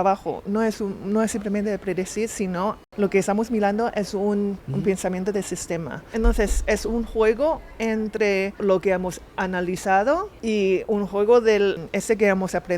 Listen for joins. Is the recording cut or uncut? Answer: cut